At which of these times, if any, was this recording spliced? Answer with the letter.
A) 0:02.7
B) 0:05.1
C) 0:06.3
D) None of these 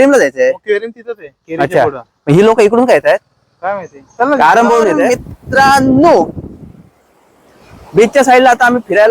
B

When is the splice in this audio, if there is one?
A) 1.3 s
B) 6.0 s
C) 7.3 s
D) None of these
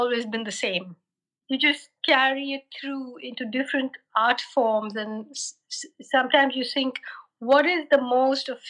A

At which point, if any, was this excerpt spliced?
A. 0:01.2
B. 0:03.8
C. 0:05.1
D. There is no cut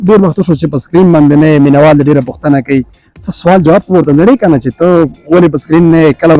D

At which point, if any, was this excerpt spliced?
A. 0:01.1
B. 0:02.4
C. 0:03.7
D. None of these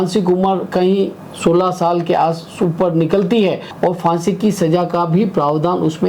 C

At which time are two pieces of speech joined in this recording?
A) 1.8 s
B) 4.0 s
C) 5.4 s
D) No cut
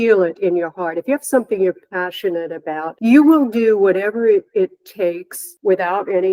D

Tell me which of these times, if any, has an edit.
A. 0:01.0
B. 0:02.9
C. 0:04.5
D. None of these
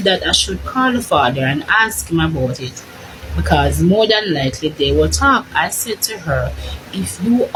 D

